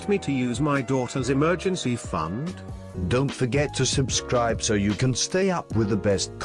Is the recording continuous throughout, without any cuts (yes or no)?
no